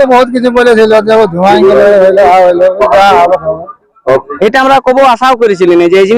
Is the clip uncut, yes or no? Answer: no